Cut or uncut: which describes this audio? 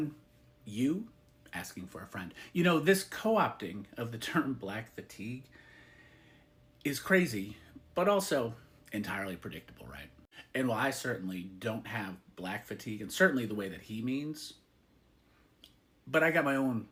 uncut